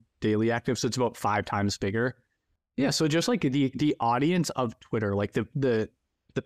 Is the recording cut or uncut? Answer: cut